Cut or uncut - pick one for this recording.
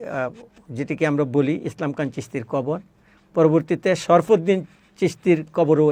uncut